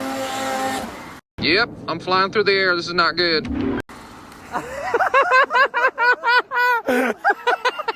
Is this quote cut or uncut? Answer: uncut